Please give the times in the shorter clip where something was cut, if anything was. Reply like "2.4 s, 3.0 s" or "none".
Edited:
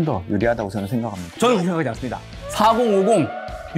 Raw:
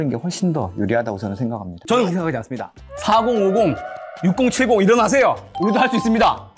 none